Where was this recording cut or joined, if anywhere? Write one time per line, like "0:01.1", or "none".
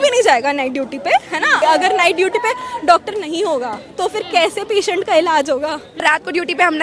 0:01.6
0:05.9